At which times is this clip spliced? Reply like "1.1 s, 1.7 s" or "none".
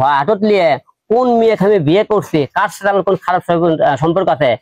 none